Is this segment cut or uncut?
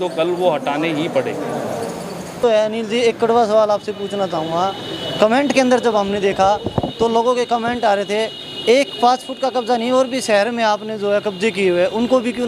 cut